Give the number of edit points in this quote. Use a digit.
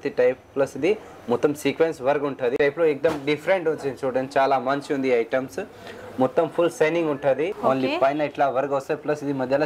2